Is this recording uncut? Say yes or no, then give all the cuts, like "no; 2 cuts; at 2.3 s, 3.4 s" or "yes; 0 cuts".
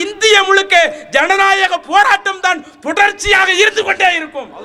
yes; 0 cuts